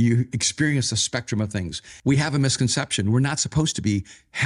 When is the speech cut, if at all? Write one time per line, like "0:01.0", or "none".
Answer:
0:01.8